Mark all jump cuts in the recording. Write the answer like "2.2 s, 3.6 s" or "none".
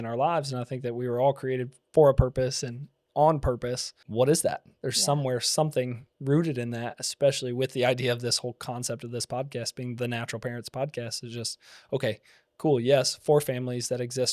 3.9 s